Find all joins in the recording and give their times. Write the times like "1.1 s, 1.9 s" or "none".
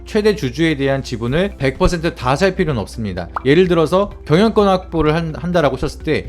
3.2 s